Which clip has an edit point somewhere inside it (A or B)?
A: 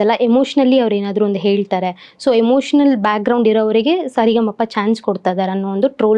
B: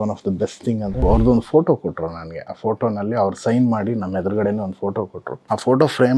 B